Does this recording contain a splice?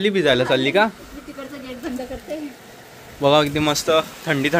no; 0 cuts

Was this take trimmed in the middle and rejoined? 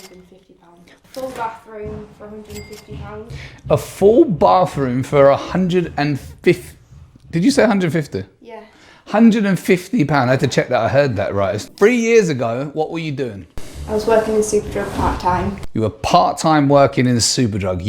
yes; 2 cuts; at 1.1 s, 11.6 s

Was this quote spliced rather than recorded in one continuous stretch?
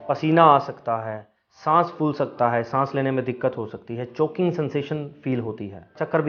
no; 0 cuts

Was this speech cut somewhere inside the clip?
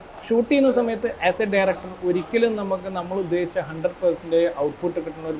no; 0 cuts

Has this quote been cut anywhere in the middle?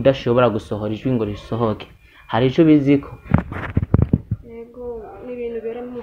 no; 0 cuts

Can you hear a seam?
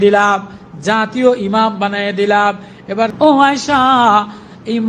yes; 1 cut; at 3.1 s

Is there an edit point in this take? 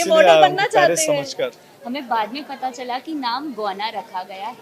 yes; 1 cut; at 1.7 s

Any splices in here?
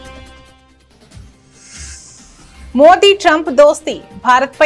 no; 0 cuts

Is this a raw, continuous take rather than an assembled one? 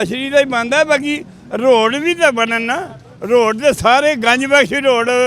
yes; 0 cuts

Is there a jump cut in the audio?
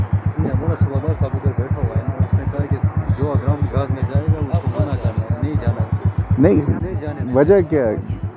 no; 0 cuts

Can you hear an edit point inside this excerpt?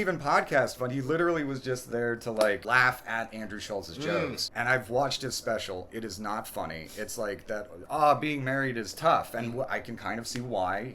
yes; 3 cuts; at 2.6 s, 4.4 s, 7.8 s

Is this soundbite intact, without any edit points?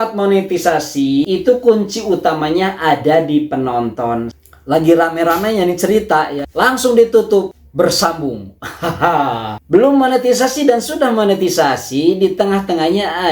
no; 3 cuts; at 1.2 s, 4.4 s, 9.5 s

